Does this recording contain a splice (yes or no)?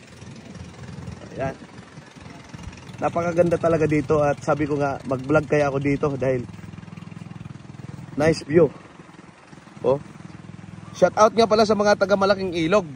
no